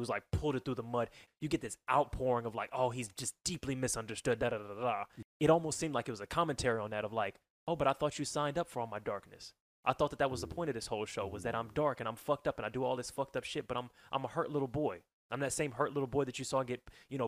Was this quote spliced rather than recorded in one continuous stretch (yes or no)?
yes